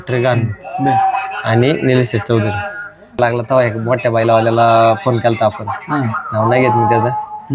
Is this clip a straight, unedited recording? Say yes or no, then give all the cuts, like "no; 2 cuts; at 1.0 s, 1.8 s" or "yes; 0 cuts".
no; 1 cut; at 3.2 s